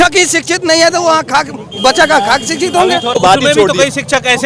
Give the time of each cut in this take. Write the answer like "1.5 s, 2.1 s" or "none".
3.2 s